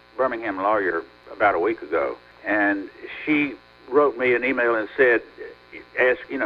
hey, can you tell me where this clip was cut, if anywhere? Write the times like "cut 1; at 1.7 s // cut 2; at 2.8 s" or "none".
cut 1; at 1.2 s // cut 2; at 2.3 s // cut 3; at 3.7 s

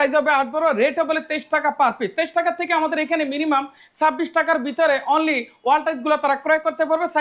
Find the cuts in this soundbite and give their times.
none

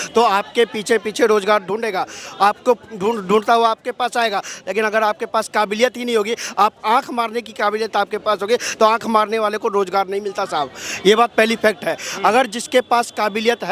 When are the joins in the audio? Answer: none

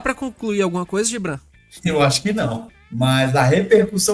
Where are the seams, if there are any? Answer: cut 1; at 2.7 s

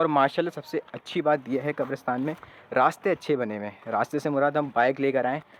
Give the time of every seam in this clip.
none

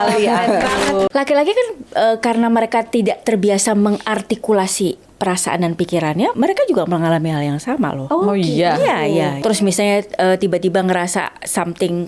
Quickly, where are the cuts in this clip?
cut 1; at 1.1 s // cut 2; at 6.3 s // cut 3; at 8.0 s // cut 4; at 9.4 s

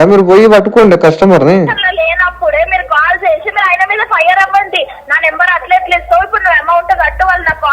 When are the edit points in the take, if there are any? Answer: cut 1; at 1.8 s

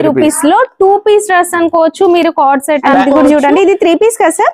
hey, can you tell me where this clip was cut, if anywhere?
cut 1; at 2.8 s

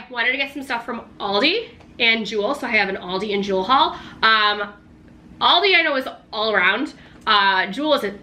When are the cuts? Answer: none

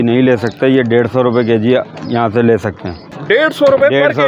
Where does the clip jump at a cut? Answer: cut 1; at 3.1 s

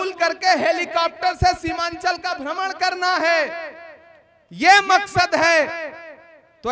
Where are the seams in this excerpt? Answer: none

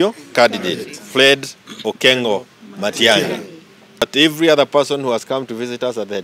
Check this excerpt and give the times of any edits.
cut 1; at 4.1 s

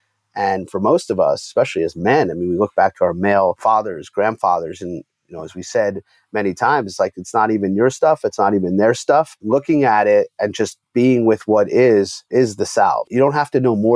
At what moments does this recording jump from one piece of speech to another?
cut 1; at 3.6 s // cut 2; at 9.4 s // cut 3; at 12.2 s // cut 4; at 13.1 s

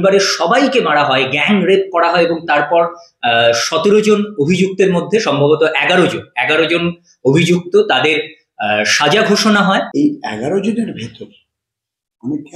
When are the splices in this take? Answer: cut 1; at 9.9 s

